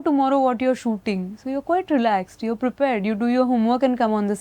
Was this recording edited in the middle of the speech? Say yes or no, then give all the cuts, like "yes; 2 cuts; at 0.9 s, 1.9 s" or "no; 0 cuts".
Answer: no; 0 cuts